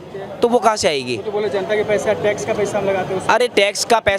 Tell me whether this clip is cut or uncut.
uncut